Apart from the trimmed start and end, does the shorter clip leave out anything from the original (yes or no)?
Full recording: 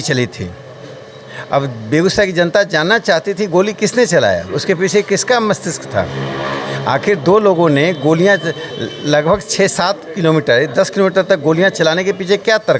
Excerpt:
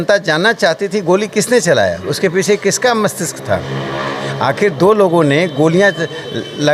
no